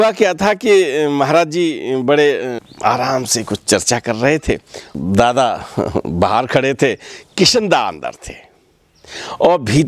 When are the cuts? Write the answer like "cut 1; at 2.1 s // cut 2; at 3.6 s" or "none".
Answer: cut 1; at 2.6 s // cut 2; at 5.0 s